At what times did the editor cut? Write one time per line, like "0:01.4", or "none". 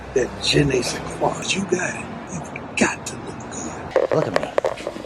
0:01.4
0:02.3
0:03.9